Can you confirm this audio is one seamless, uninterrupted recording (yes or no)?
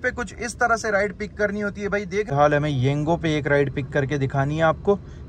no